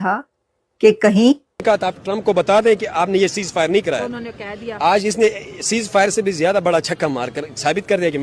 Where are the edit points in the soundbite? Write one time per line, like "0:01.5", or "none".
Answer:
0:02.0